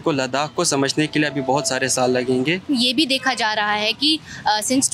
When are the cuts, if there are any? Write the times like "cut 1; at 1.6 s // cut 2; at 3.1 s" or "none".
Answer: cut 1; at 2.7 s